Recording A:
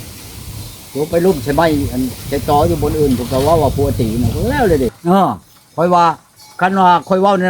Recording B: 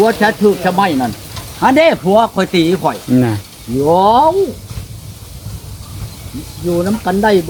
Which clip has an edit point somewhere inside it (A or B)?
A